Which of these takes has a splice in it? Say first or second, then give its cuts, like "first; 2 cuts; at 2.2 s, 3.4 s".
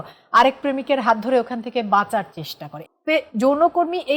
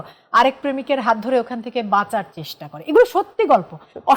first; 1 cut; at 2.7 s